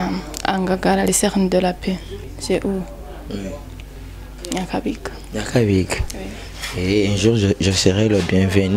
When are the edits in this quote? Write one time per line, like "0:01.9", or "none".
0:02.1